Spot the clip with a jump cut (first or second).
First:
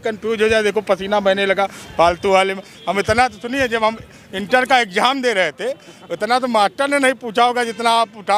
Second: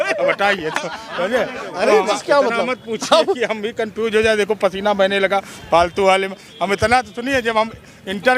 second